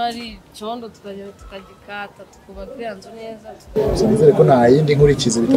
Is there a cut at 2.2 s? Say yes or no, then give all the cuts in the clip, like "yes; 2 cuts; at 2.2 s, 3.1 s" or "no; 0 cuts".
no; 1 cut; at 3.8 s